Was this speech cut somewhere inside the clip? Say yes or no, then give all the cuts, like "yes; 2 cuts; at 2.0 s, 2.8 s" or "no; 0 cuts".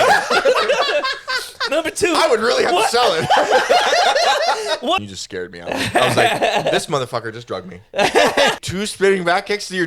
yes; 2 cuts; at 5.0 s, 8.5 s